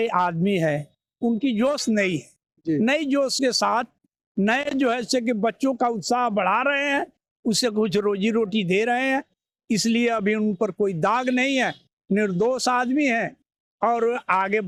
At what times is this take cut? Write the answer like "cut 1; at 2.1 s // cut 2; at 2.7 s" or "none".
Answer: none